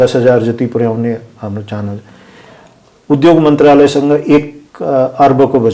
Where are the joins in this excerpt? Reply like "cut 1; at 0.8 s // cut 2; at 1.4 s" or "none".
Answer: none